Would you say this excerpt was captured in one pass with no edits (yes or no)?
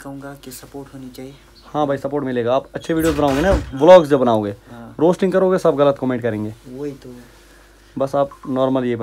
yes